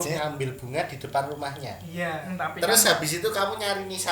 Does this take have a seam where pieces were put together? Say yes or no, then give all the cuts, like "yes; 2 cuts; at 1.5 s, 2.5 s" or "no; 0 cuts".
yes; 1 cut; at 2.2 s